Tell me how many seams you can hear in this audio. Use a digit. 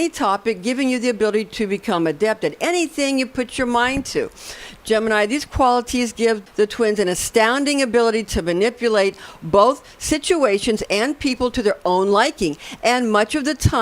1